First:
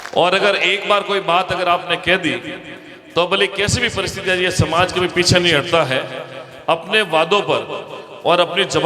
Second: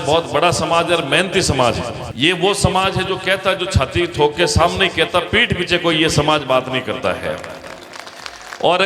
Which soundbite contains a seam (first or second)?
second